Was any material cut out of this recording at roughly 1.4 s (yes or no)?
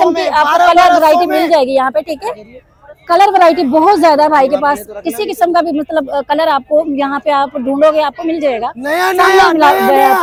no